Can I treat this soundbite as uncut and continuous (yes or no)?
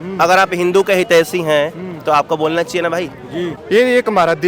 no